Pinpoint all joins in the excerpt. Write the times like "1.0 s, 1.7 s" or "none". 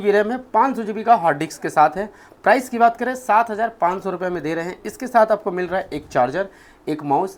none